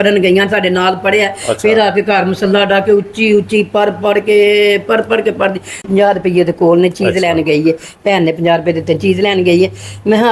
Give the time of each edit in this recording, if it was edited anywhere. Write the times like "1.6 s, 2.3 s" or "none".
5.9 s